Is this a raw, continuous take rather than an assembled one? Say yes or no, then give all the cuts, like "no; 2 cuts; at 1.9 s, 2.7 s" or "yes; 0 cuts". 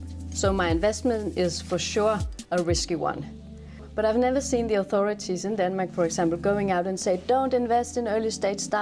no; 1 cut; at 3.9 s